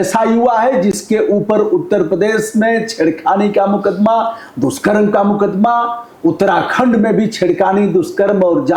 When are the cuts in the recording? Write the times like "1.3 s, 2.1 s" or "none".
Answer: none